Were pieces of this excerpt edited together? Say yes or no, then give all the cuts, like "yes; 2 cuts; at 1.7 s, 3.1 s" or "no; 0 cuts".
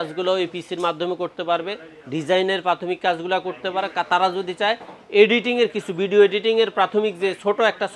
no; 0 cuts